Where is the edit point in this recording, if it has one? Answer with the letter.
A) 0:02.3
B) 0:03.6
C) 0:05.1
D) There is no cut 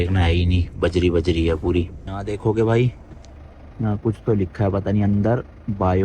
A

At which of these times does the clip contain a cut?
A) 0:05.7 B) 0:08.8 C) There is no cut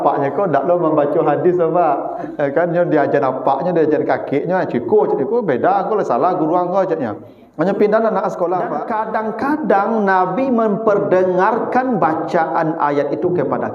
B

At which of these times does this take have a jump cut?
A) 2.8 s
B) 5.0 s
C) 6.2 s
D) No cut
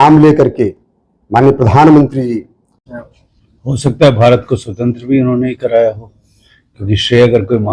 A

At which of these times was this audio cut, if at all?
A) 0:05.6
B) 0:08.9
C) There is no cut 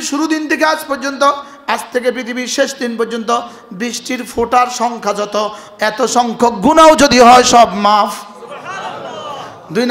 C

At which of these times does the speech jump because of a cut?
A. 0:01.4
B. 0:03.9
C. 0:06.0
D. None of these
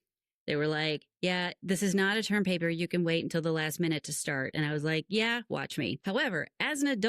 C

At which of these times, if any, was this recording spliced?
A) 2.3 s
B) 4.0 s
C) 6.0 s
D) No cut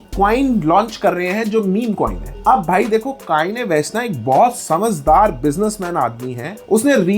D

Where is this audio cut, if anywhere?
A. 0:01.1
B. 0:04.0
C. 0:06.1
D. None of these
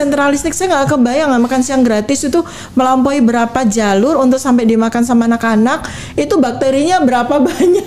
D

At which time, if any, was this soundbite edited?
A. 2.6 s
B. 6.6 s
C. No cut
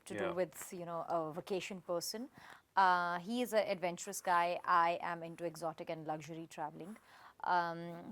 C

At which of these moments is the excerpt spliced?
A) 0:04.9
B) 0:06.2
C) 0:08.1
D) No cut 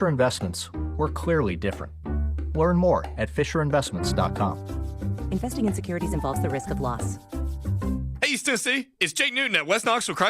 C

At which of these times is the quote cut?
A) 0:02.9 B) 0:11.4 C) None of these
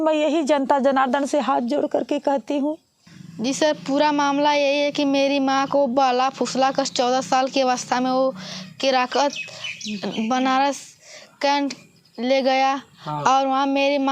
A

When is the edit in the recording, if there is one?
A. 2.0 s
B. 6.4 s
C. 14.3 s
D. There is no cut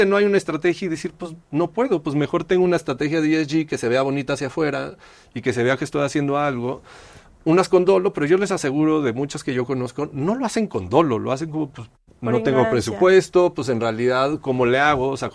D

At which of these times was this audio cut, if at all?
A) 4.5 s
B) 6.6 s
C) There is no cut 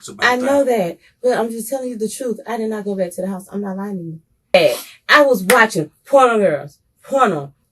A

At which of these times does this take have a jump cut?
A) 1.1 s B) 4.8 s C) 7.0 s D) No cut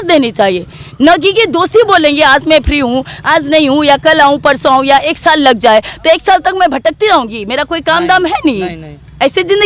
D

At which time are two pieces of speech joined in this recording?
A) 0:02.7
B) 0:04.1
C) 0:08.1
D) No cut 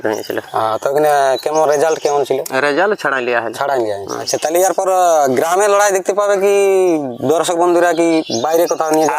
B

